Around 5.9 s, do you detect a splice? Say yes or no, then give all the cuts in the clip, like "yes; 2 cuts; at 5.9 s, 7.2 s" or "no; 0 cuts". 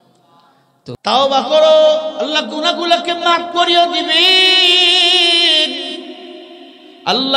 no; 1 cut; at 1.0 s